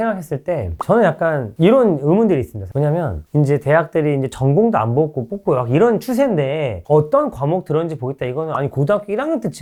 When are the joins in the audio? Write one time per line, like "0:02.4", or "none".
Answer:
none